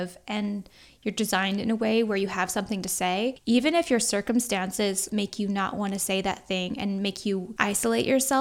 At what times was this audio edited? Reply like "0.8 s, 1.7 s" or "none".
3.4 s, 5.1 s, 7.5 s

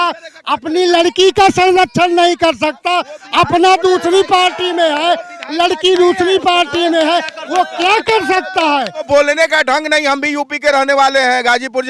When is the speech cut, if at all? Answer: 9.1 s

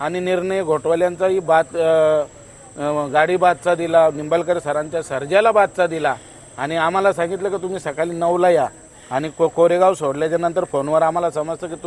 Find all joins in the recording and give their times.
none

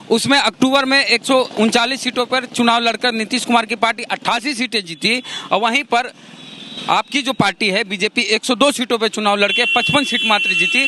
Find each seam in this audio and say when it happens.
none

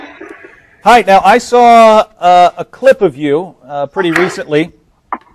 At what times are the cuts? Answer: 4.4 s

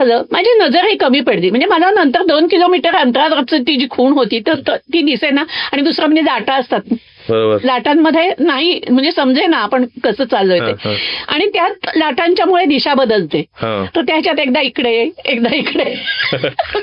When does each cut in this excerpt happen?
none

